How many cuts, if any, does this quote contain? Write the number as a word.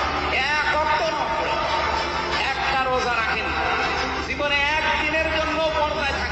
zero